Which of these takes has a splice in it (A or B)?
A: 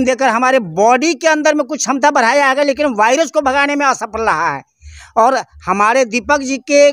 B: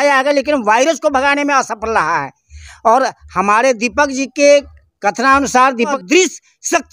B